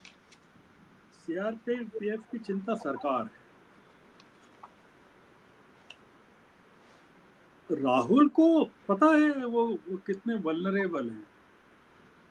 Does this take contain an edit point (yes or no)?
no